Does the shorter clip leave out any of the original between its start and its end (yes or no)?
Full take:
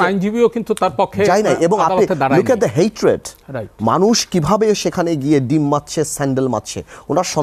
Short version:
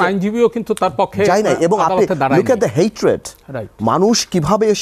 no